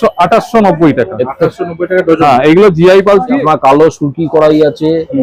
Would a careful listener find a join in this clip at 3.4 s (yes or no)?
yes